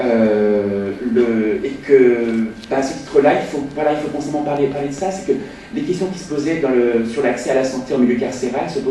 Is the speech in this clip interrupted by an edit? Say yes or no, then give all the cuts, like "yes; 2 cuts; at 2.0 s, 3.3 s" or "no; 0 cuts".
yes; 1 cut; at 3.3 s